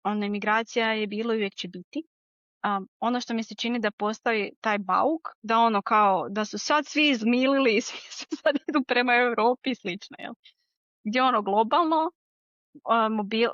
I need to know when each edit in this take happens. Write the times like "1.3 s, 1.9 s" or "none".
none